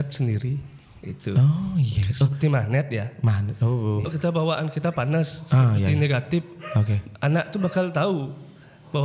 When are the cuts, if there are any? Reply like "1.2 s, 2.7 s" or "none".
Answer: 4.1 s